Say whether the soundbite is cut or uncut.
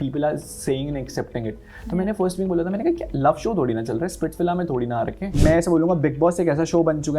cut